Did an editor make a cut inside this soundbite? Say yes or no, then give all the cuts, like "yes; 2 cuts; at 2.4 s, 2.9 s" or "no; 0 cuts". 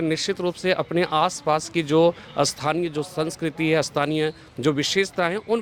no; 0 cuts